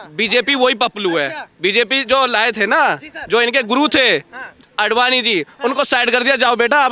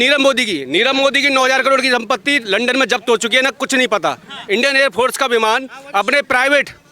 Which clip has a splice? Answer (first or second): second